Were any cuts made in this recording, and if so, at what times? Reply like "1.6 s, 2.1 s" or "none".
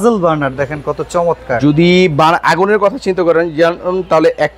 none